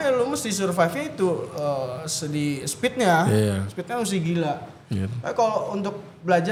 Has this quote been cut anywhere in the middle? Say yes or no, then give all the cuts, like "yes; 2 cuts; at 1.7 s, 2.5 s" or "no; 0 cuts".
no; 0 cuts